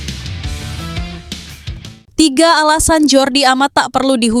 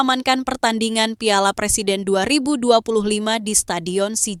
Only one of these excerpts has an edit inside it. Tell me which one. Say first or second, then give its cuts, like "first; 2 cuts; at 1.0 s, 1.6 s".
first; 1 cut; at 1.7 s